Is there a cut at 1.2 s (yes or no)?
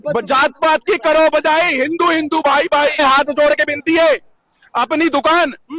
no